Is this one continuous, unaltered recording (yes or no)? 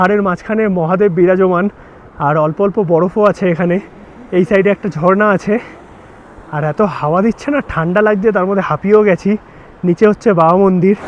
yes